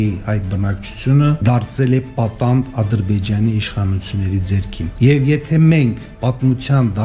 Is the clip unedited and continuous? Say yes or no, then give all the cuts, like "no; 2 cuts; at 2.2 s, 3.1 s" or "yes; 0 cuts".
no; 3 cuts; at 1.4 s, 4.9 s, 6.1 s